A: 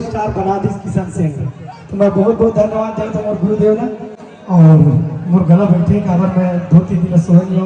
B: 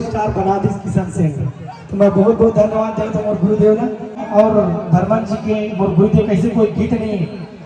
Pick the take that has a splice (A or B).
B